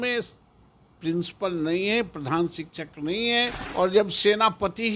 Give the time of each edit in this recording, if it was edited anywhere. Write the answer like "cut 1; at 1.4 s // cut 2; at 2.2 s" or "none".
cut 1; at 3.6 s